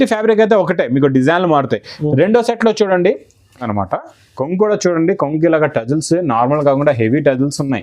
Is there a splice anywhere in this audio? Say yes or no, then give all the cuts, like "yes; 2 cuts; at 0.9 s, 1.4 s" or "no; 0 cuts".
yes; 1 cut; at 3.7 s